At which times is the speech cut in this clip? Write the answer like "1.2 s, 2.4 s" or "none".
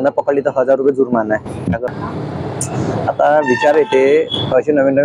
1.9 s